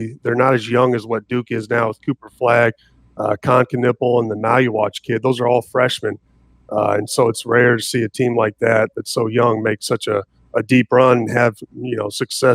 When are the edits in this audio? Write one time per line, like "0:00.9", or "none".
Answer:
none